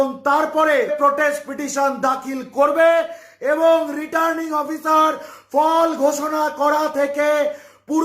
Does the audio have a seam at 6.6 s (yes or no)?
no